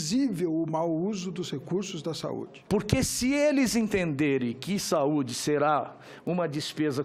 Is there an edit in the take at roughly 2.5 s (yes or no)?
yes